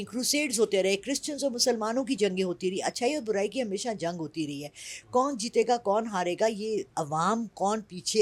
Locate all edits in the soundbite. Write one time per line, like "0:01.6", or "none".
none